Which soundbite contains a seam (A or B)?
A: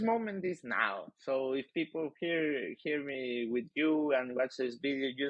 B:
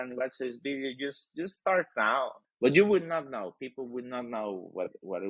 B